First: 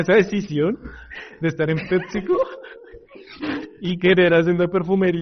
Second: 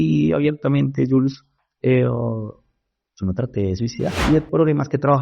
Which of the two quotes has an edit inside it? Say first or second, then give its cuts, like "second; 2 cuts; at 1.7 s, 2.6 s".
second; 1 cut; at 4.2 s